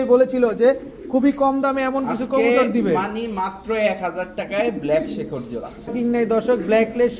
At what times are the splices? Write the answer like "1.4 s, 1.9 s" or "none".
5.9 s